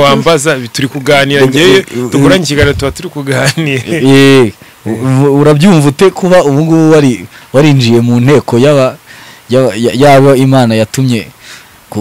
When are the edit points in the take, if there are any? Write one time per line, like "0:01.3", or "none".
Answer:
none

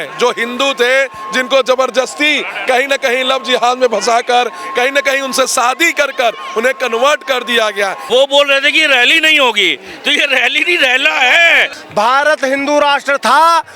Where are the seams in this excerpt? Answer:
0:08.0
0:11.7

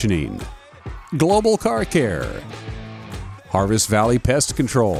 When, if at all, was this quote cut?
none

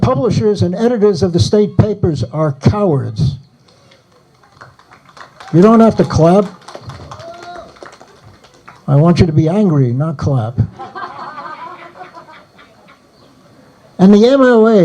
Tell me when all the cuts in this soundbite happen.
0:13.9

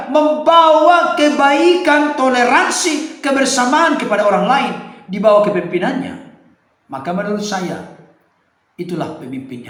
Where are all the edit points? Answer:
none

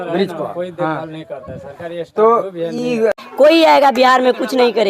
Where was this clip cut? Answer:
0:03.2

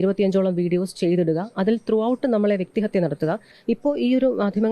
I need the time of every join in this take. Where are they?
0:03.5

